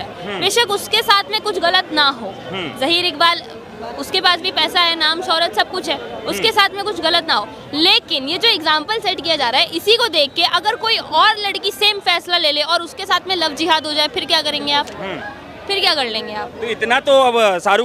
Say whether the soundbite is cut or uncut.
uncut